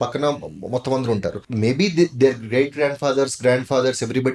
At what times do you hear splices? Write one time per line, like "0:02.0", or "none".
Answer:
0:01.4